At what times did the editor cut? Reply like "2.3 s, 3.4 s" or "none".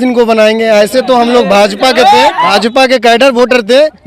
2.4 s